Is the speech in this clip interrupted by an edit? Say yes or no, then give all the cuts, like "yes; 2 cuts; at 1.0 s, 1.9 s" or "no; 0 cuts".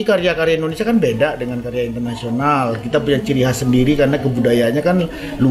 no; 0 cuts